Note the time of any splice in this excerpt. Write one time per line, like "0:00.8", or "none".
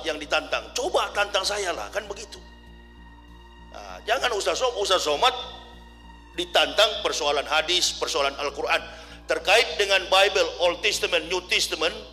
none